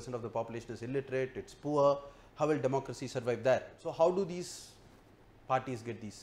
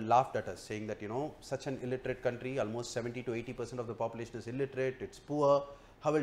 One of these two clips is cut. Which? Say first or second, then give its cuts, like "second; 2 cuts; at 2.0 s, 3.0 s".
first; 1 cut; at 3.9 s